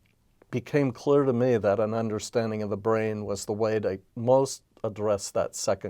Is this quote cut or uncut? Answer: cut